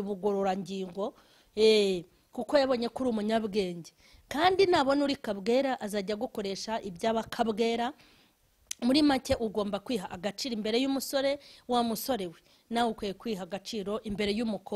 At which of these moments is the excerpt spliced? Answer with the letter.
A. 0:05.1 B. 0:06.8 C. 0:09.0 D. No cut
D